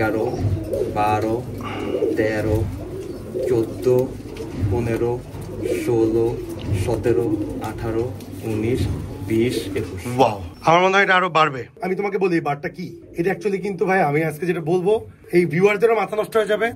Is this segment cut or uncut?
cut